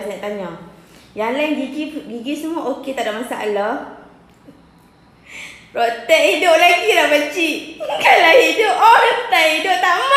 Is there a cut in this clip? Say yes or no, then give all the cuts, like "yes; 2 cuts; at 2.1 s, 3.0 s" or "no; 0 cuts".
no; 0 cuts